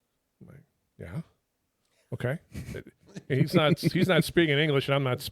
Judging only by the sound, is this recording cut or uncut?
uncut